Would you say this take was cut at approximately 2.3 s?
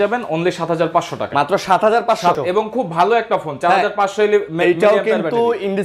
yes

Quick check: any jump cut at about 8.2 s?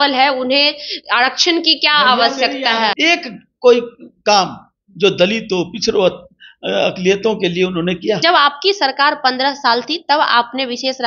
yes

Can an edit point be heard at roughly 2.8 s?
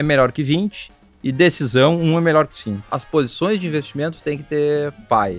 yes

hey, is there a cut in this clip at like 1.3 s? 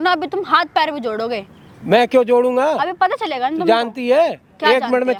no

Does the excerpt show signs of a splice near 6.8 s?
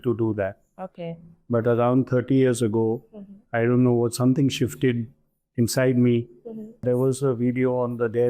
yes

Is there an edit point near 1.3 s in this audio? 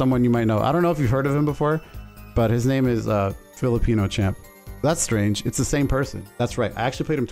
no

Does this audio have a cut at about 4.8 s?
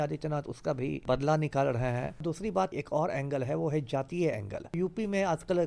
yes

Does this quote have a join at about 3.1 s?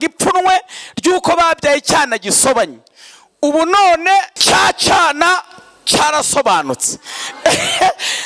no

